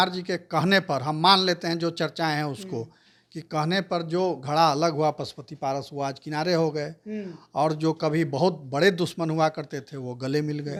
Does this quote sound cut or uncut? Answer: uncut